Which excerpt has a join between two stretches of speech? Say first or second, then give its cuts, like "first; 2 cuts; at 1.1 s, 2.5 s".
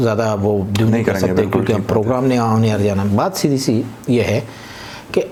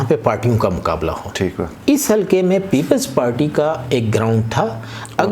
second; 1 cut; at 1.7 s